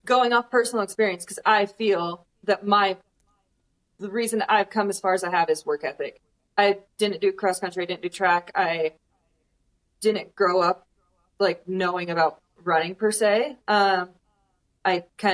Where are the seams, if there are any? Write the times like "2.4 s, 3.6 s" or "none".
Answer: none

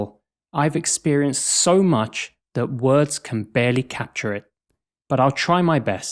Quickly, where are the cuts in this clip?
none

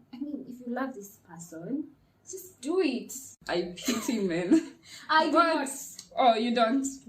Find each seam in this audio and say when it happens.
3.4 s

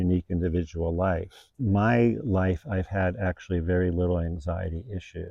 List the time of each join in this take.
none

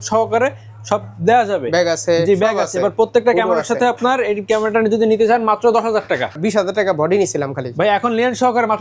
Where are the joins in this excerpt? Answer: 6.4 s

